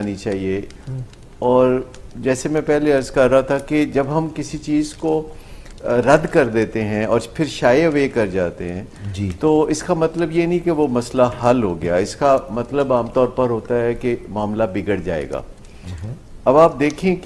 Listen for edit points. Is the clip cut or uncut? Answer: uncut